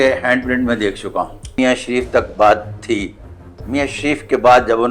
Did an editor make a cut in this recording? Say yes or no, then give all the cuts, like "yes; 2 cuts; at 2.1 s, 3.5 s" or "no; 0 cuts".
yes; 1 cut; at 1.6 s